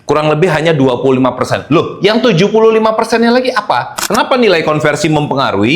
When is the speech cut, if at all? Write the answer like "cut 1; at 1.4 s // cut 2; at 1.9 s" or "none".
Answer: cut 1; at 4.0 s